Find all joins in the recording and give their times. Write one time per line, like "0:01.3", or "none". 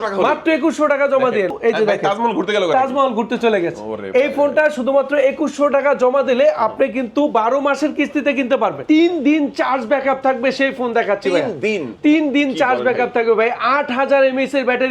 0:01.5
0:08.8